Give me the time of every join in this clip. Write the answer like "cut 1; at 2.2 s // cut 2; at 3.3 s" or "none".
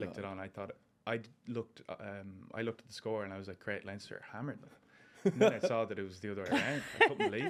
none